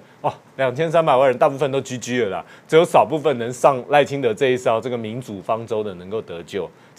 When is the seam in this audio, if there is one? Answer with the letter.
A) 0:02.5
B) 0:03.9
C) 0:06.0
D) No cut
D